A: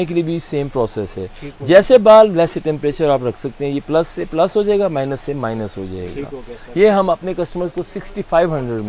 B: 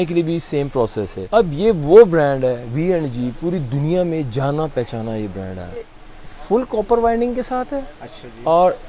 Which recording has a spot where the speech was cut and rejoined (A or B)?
B